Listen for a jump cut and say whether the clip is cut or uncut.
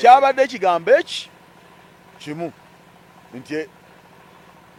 uncut